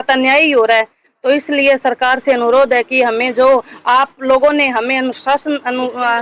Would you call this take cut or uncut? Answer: uncut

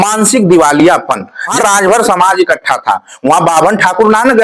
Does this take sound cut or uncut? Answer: cut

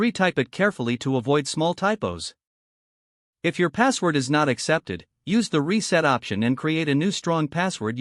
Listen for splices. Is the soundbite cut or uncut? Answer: uncut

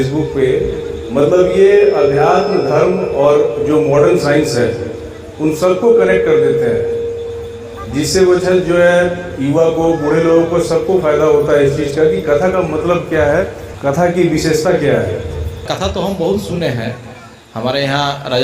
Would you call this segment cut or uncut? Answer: cut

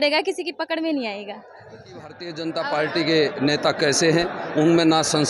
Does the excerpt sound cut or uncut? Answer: cut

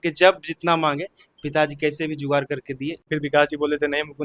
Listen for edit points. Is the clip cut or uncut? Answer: cut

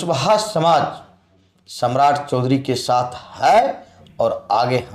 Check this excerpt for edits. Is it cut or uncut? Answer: uncut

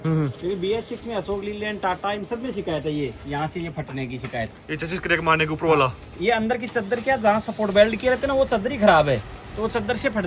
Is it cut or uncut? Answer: uncut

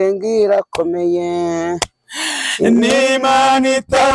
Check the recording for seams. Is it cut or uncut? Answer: uncut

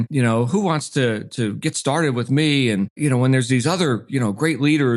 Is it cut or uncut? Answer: cut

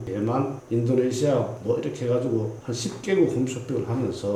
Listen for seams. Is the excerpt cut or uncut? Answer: uncut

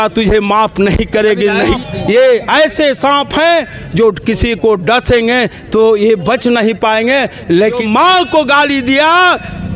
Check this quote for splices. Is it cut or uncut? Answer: cut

